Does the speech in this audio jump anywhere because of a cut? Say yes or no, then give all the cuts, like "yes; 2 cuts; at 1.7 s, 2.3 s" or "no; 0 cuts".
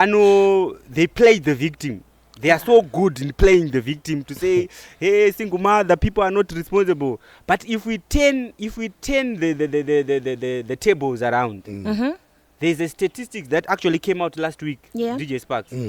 no; 0 cuts